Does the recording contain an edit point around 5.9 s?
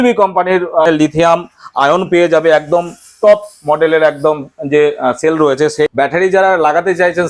yes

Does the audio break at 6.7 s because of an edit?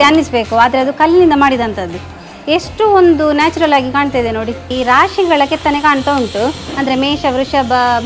no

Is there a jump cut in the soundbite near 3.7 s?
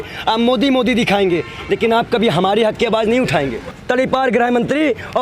yes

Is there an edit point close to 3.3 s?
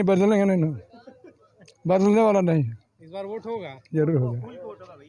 no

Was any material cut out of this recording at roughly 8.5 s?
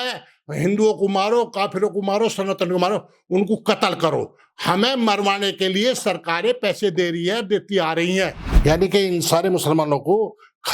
yes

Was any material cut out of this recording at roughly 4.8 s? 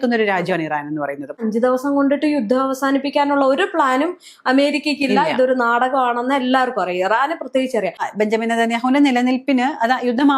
no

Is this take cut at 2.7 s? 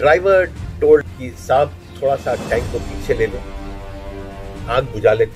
no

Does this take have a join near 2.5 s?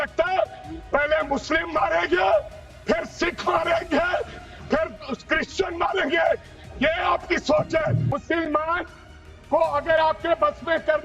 no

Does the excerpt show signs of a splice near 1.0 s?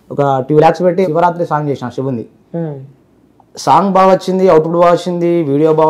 yes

